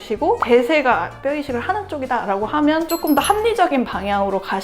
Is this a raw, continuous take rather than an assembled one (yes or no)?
no